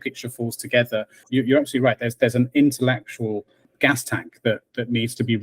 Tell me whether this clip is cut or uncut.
cut